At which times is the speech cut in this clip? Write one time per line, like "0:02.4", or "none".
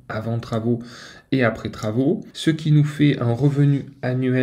0:02.3